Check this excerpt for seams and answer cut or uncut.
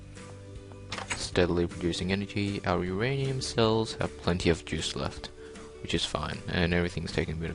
cut